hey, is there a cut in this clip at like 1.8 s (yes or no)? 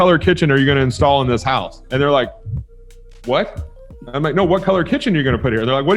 yes